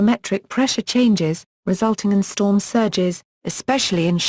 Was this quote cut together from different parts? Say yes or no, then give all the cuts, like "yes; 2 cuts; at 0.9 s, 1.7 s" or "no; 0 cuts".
no; 0 cuts